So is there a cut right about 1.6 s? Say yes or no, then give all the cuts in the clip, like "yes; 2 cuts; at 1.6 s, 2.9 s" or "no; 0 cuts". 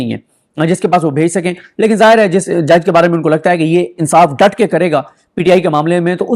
no; 0 cuts